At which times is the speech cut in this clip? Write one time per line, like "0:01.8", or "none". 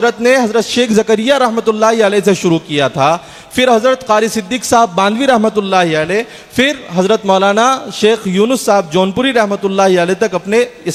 none